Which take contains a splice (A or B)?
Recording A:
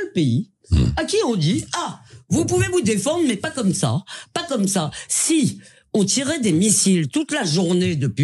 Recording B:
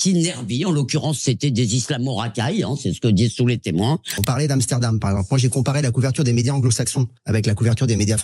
B